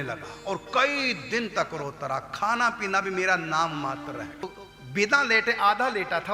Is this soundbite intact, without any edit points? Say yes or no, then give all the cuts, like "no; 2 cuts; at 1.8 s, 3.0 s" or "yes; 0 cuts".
no; 1 cut; at 4.4 s